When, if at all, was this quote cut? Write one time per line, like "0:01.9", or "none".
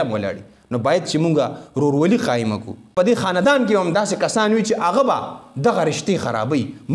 0:02.9